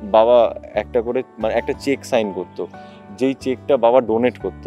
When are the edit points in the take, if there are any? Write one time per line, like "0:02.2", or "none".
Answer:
none